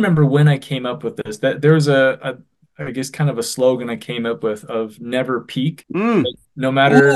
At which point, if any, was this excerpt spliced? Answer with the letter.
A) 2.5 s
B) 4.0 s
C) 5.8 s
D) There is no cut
C